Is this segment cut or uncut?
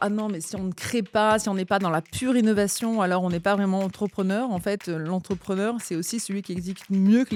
uncut